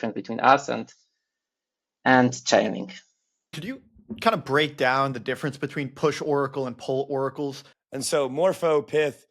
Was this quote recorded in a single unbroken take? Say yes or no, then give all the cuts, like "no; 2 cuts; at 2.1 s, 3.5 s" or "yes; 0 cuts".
no; 2 cuts; at 3.6 s, 7.7 s